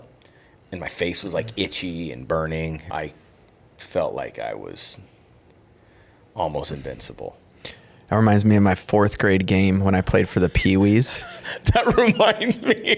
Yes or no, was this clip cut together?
yes